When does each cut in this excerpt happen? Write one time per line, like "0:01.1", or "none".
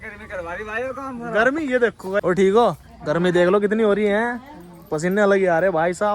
0:02.2